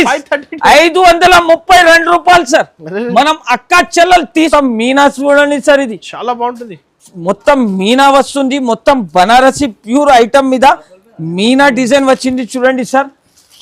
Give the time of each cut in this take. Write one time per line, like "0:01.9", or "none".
0:04.5